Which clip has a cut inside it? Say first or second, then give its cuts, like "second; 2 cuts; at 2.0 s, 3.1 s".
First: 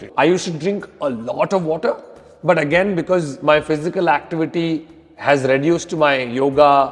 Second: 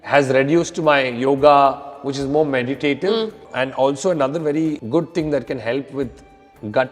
second; 2 cuts; at 3.4 s, 4.8 s